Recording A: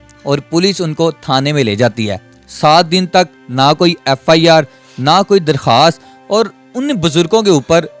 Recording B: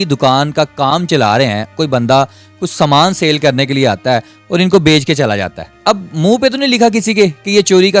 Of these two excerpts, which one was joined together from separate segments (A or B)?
B